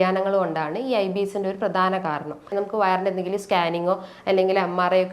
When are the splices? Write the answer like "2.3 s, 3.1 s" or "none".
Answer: 2.5 s